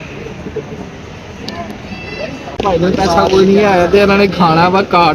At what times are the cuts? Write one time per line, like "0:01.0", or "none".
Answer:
0:02.6